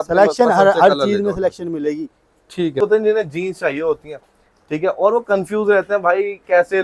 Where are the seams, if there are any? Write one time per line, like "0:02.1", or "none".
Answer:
0:02.8